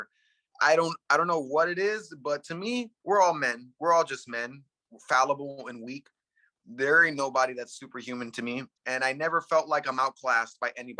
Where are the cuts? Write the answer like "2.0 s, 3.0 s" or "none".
8.7 s